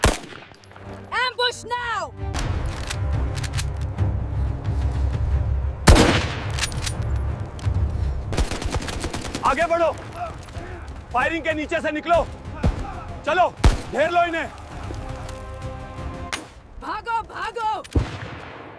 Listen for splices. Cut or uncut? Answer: uncut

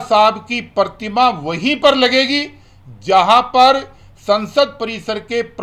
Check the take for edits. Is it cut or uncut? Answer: uncut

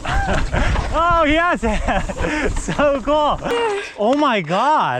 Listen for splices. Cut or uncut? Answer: cut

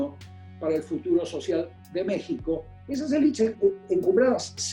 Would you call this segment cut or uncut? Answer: cut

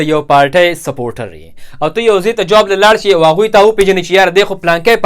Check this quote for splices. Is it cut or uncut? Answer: cut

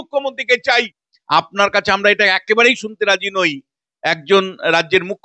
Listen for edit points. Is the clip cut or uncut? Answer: cut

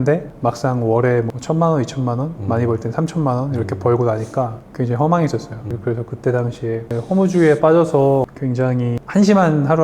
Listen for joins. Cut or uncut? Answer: cut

